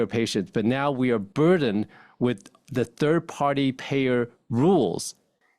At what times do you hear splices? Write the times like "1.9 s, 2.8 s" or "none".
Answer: none